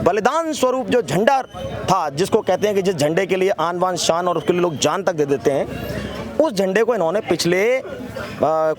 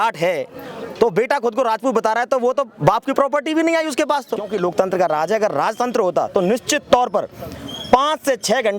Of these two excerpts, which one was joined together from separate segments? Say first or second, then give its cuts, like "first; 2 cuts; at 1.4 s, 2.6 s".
second; 1 cut; at 4.5 s